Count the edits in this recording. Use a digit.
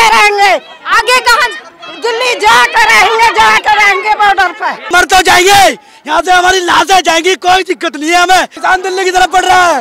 2